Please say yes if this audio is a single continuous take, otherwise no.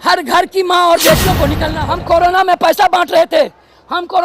no